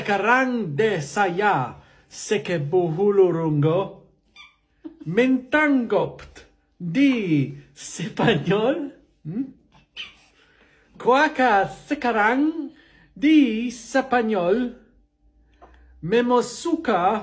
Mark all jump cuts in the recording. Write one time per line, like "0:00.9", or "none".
none

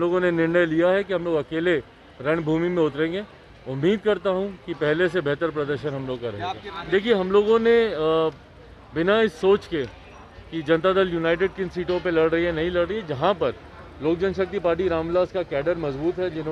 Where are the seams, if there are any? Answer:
0:06.7

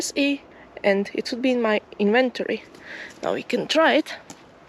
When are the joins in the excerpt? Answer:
none

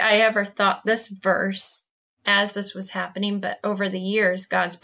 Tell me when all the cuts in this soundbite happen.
none

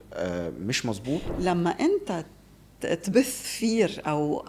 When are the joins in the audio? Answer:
0:01.3

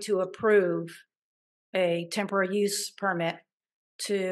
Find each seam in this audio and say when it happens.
none

